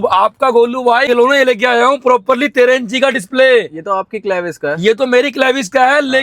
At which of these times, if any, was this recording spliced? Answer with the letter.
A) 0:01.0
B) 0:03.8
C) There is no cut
A